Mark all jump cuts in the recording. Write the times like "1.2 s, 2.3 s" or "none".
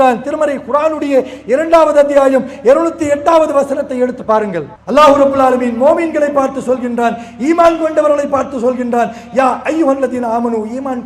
4.7 s